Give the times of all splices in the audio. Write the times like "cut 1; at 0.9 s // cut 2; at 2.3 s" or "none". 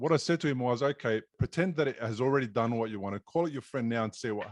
cut 1; at 1.4 s

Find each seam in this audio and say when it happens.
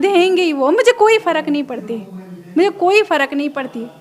none

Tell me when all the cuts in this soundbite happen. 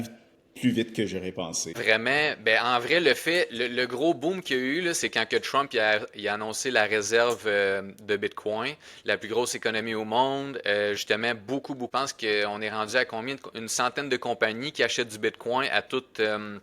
cut 1; at 1.8 s // cut 2; at 11.9 s

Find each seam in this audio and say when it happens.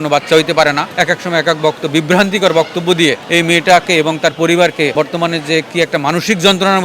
cut 1; at 0.9 s // cut 2; at 3.2 s // cut 3; at 4.9 s

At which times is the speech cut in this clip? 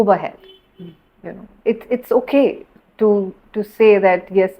none

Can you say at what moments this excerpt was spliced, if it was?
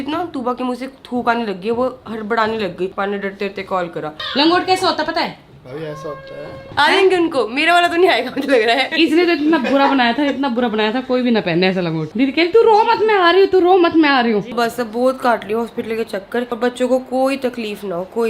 cut 1; at 2.9 s // cut 2; at 4.1 s // cut 3; at 6.6 s // cut 4; at 8.9 s // cut 5; at 12.0 s // cut 6; at 14.5 s // cut 7; at 16.5 s

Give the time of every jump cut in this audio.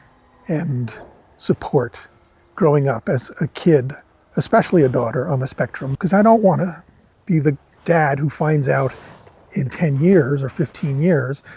cut 1; at 5.8 s

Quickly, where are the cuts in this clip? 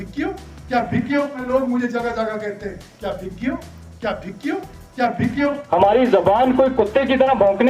cut 1; at 1.4 s // cut 2; at 5.6 s

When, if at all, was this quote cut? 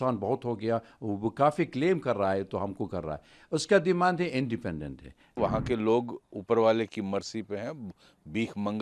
cut 1; at 5.3 s

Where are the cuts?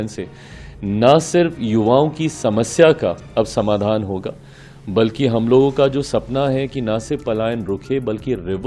none

